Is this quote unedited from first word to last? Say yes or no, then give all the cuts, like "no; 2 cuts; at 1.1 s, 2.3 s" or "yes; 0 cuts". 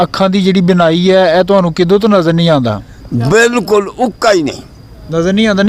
yes; 0 cuts